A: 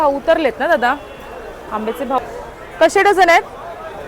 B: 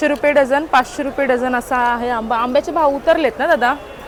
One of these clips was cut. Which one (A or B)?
A